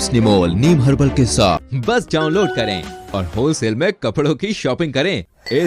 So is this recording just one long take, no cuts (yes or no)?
no